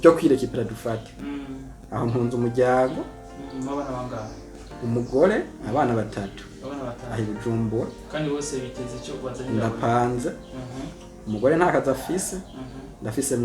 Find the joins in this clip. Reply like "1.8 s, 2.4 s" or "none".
none

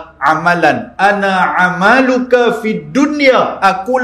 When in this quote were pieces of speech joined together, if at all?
none

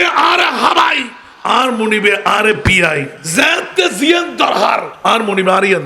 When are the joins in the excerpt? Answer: 3.2 s, 4.9 s

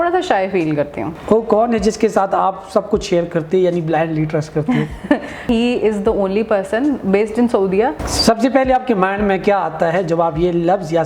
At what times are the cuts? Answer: 1.1 s, 5.5 s, 8.0 s

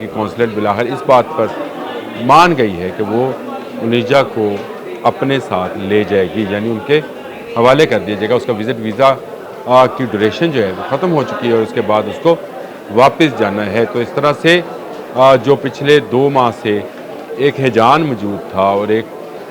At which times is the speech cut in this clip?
none

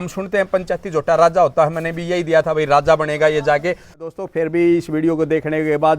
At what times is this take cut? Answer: 4.1 s

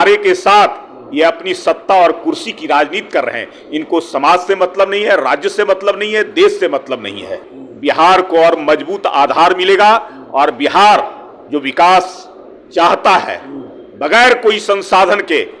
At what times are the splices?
7.5 s

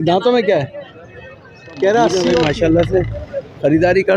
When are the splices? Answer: 2.1 s

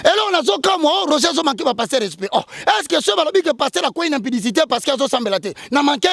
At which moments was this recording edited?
none

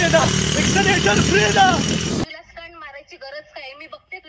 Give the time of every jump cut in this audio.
none

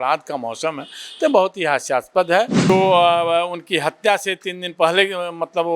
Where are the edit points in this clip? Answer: 2.7 s

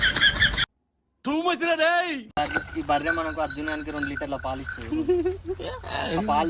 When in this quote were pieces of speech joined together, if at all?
none

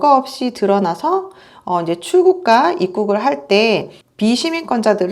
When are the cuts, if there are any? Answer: none

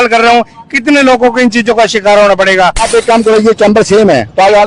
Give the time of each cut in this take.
2.9 s

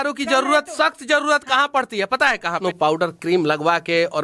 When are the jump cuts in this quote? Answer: 2.6 s

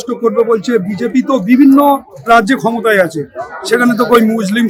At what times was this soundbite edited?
none

